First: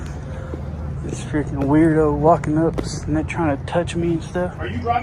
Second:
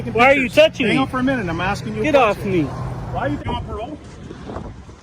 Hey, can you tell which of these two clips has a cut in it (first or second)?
second